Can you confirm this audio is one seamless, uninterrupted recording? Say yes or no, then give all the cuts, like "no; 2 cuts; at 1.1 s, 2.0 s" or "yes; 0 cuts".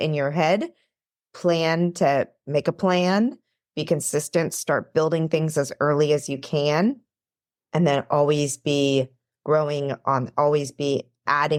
yes; 0 cuts